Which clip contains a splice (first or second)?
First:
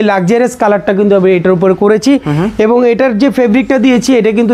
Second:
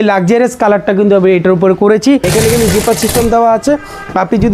second